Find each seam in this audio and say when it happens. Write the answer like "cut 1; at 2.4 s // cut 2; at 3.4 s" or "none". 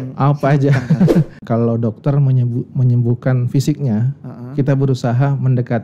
cut 1; at 1.4 s

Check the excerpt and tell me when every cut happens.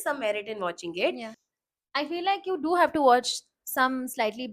cut 1; at 1.4 s

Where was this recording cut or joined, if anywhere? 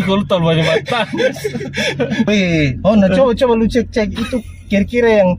cut 1; at 2.3 s

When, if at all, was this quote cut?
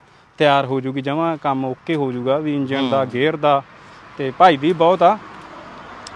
none

